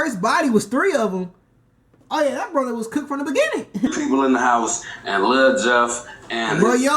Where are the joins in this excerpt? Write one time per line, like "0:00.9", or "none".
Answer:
0:03.9